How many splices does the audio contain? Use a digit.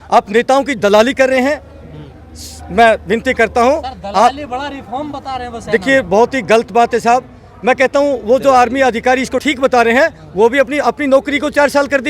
0